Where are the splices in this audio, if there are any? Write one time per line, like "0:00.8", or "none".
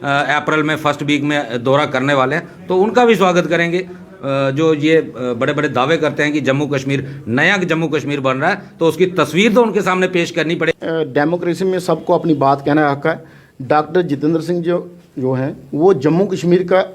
0:10.7